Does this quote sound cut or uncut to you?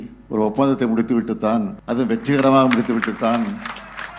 cut